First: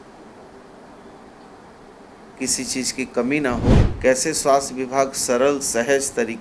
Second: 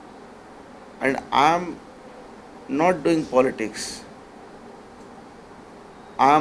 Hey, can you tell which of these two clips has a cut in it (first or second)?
first